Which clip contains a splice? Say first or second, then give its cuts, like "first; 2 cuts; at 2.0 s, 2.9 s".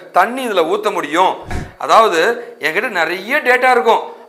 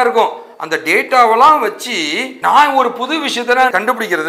first; 1 cut; at 1.6 s